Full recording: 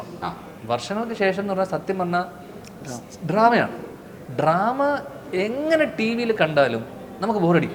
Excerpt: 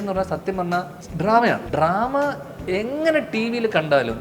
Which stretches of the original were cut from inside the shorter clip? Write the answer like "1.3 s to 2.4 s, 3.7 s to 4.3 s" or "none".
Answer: 2.4 s to 3.1 s, 3.7 s to 4.3 s